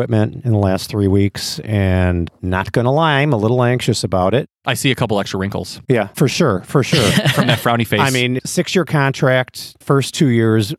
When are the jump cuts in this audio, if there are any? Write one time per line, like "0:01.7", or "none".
none